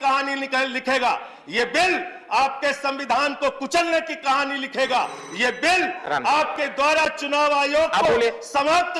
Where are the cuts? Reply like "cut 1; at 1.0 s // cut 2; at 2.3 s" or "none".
none